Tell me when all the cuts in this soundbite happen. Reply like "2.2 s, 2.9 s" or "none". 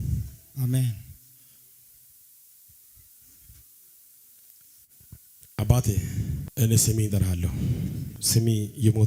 6.4 s, 8.1 s